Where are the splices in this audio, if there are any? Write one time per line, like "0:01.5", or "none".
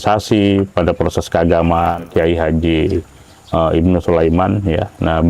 0:02.0